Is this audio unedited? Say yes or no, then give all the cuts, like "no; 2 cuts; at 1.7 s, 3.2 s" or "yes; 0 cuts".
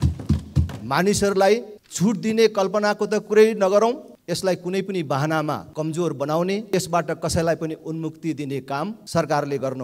no; 5 cuts; at 1.8 s, 4.1 s, 5.7 s, 6.7 s, 9.0 s